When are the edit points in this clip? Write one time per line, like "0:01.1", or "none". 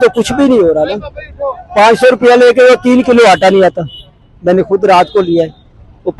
none